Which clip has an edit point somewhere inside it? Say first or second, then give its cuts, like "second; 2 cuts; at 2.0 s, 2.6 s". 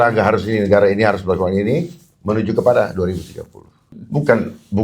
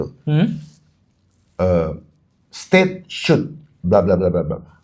first; 1 cut; at 3.9 s